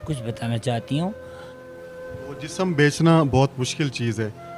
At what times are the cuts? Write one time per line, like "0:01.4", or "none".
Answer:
0:01.3
0:02.6